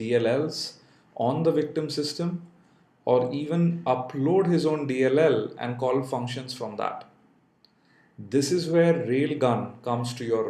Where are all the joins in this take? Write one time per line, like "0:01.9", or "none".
0:01.2

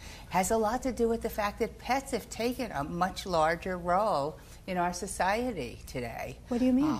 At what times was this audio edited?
none

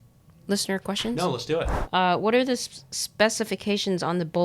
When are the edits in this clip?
0:01.8

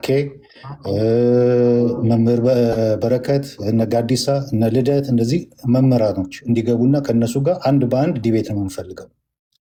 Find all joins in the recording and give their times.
none

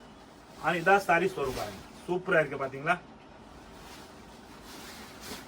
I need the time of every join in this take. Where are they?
none

